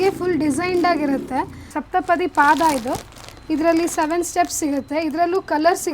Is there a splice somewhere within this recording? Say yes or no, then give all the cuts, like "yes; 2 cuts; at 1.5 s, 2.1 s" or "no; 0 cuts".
yes; 1 cut; at 1.7 s